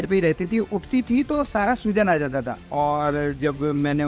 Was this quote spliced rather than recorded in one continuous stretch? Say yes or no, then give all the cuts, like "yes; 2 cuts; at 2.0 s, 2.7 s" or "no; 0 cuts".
no; 0 cuts